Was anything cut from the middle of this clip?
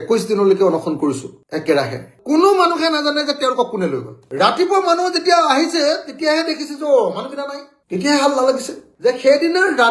yes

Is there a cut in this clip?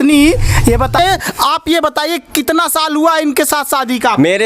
yes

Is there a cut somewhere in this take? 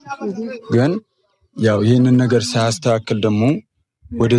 no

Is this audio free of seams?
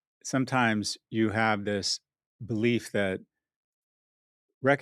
yes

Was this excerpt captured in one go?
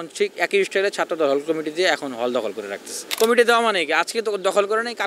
no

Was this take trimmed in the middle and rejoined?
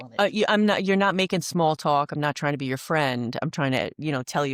no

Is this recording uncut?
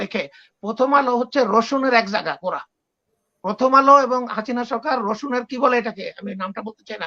yes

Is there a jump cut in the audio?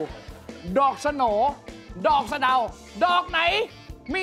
no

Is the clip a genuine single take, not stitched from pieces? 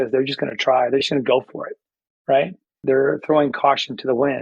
no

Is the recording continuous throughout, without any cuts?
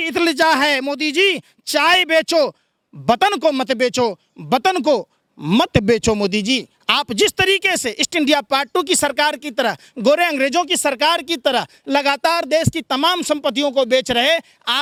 yes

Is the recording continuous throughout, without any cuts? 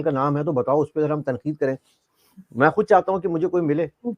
yes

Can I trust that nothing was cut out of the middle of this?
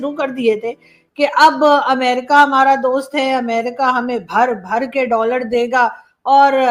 yes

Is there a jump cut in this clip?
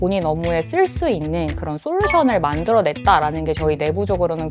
no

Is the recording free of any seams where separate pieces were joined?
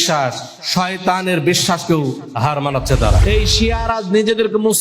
no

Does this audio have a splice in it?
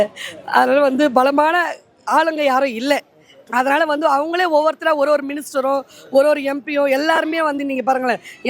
no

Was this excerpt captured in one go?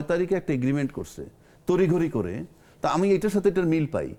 yes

